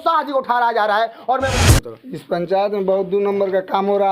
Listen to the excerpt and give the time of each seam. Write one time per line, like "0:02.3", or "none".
0:01.5